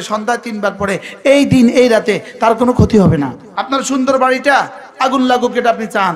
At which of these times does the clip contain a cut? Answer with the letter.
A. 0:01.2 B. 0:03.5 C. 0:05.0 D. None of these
B